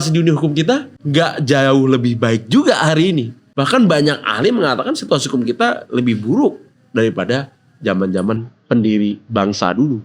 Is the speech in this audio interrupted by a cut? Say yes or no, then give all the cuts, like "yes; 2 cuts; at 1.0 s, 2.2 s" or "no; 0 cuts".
yes; 2 cuts; at 1.0 s, 3.4 s